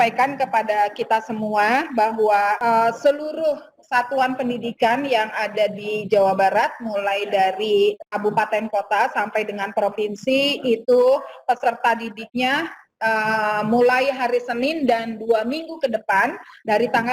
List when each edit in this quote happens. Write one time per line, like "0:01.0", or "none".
0:02.6